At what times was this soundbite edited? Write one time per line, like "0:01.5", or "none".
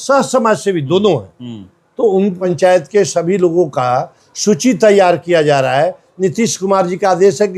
0:02.5